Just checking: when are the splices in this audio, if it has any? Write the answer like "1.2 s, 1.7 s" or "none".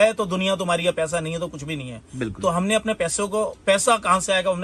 none